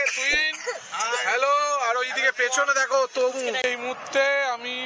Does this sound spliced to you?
yes; 1 cut; at 3.6 s

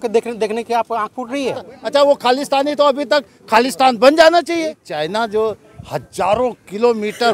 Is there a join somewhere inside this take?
yes; 2 cuts; at 1.7 s, 4.9 s

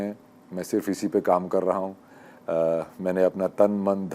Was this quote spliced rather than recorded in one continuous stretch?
no; 0 cuts

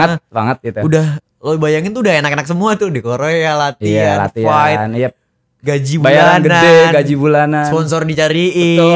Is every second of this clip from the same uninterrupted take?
yes; 0 cuts

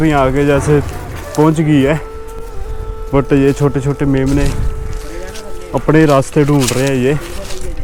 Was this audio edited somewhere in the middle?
no; 0 cuts

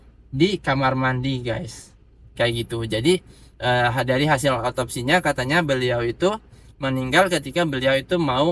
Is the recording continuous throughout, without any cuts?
yes; 0 cuts

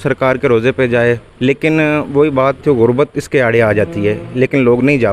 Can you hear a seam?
yes; 2 cuts; at 1.3 s, 2.6 s

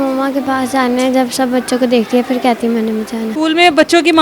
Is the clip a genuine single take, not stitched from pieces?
no; 1 cut; at 3.3 s

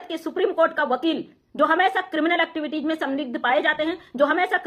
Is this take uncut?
yes; 0 cuts

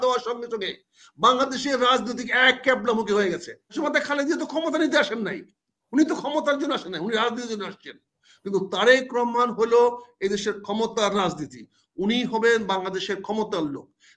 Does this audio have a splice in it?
yes; 1 cut; at 3.7 s

